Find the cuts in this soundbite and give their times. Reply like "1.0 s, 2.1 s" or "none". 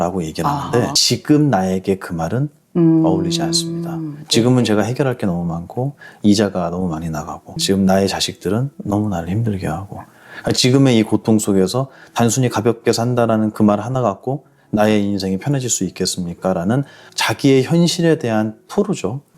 1.0 s